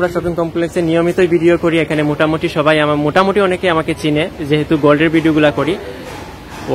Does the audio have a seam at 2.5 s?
no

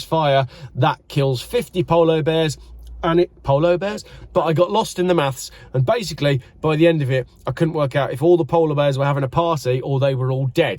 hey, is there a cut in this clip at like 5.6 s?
no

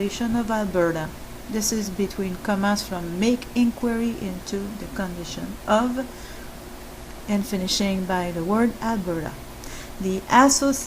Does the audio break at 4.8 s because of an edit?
no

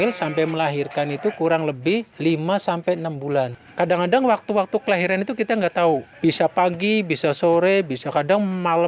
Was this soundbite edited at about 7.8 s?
no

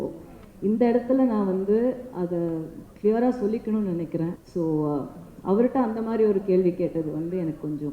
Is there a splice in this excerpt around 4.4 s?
yes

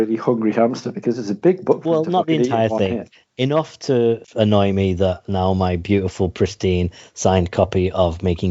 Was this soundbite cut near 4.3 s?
yes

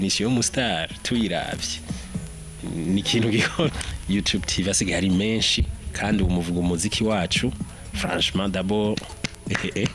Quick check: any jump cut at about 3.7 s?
yes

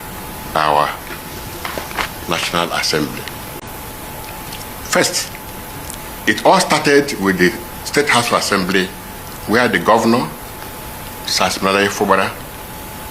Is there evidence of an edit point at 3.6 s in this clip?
yes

